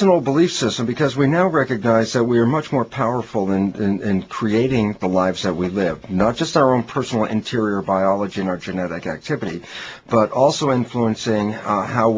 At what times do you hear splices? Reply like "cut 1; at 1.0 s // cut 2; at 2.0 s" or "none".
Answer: cut 1; at 8.0 s